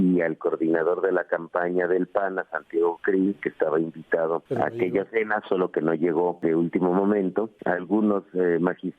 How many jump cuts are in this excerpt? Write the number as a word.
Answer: three